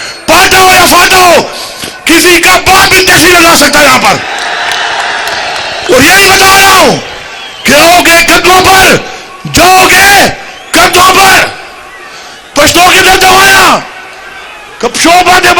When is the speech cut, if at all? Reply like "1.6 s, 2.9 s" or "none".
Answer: none